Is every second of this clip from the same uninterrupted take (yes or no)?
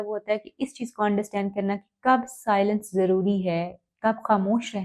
yes